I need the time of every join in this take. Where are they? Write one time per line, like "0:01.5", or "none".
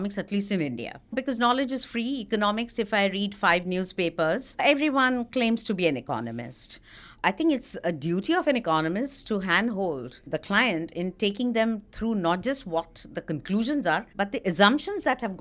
0:01.1
0:04.6
0:07.1
0:10.3
0:14.1

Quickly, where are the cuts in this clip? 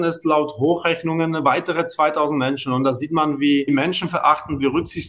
0:03.7

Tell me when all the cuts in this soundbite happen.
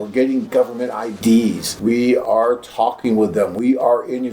0:01.7

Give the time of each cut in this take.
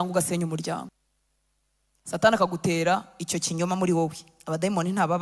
0:00.9

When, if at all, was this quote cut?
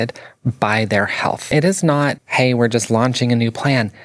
0:01.5
0:02.2

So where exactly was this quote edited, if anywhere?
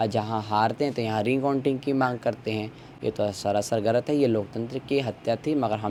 none

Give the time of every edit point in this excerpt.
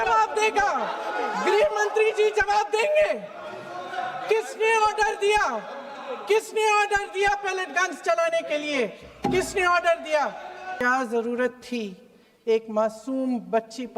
0:10.8

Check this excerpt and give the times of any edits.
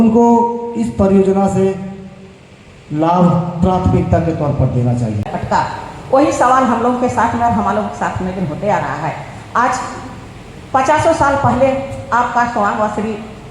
0:05.3

